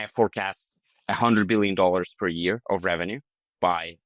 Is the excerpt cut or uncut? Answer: uncut